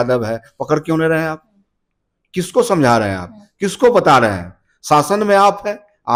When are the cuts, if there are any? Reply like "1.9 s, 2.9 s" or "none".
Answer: none